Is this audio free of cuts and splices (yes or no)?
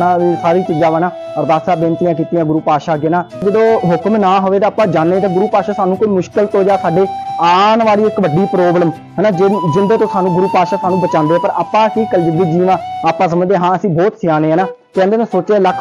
no